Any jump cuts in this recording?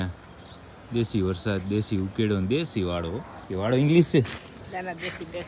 no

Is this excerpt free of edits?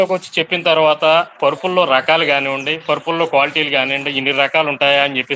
yes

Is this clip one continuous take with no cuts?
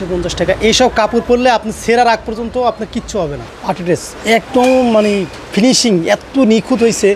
no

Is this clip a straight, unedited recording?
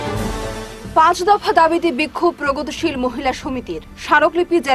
yes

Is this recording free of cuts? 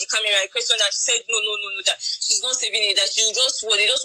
yes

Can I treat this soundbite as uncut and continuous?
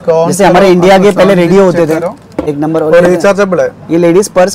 no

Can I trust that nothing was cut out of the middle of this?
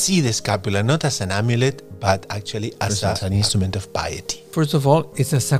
no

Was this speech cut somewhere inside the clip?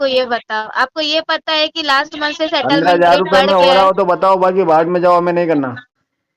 no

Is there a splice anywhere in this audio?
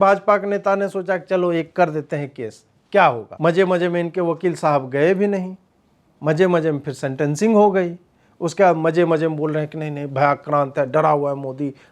yes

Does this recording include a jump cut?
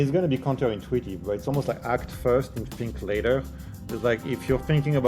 no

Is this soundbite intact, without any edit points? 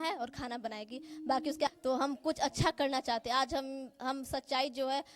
no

